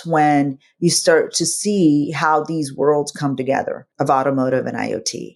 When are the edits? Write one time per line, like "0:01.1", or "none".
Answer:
none